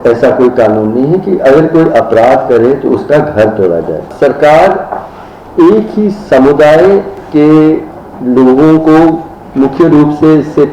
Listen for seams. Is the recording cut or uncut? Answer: cut